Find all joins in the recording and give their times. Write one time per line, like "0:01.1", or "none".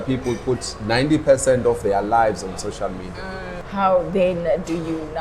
0:03.6